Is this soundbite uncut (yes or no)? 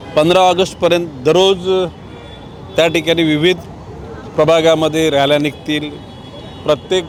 yes